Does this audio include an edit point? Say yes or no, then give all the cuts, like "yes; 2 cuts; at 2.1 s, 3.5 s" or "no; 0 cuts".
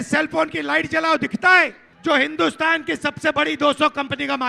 yes; 1 cut; at 1.8 s